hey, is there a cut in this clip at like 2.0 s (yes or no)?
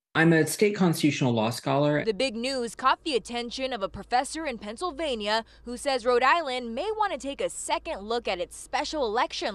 yes